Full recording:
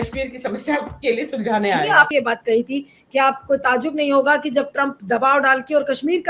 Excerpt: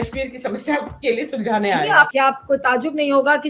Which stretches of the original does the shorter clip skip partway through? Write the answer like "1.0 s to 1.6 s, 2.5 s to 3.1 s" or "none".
2.1 s to 3.1 s